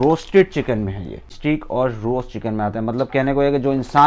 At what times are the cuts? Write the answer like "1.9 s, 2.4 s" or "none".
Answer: 1.3 s